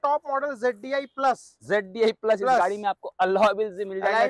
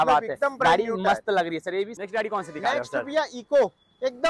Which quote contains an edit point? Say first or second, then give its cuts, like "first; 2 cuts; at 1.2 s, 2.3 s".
second; 1 cut; at 1.9 s